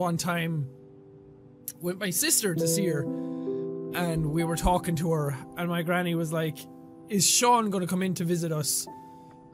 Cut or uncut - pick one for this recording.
uncut